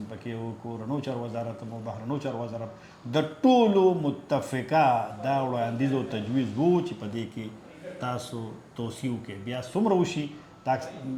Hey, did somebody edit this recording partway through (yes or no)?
no